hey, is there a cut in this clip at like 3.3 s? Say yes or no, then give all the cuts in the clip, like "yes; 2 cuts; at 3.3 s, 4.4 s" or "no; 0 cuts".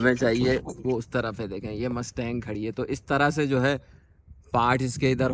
no; 0 cuts